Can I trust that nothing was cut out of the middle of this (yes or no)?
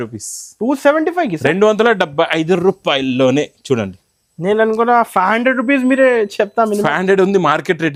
yes